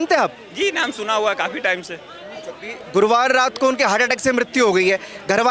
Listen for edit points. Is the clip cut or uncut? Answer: uncut